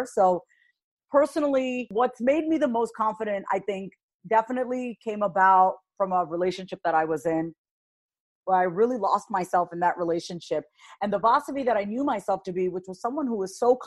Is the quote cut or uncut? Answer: cut